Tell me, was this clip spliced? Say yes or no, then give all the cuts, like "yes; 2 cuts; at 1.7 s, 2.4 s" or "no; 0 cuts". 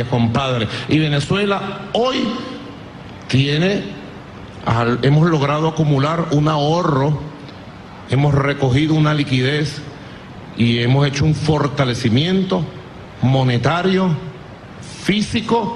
no; 0 cuts